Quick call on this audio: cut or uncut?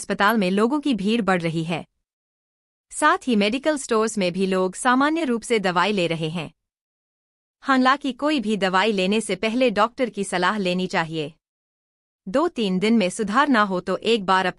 uncut